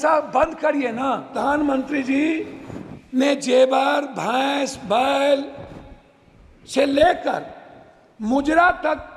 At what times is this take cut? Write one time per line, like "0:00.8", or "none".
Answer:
0:01.3